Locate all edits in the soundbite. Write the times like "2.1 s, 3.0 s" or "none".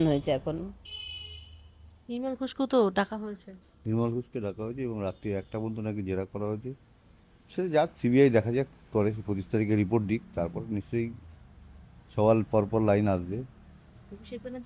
none